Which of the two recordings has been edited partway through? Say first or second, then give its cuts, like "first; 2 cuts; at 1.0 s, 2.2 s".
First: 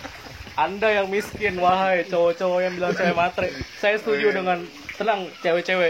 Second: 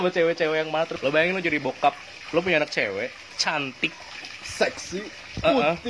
second; 1 cut; at 0.9 s